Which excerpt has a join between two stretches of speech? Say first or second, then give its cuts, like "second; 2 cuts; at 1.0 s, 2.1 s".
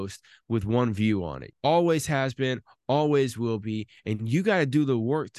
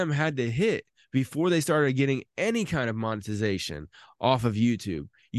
first; 1 cut; at 1.4 s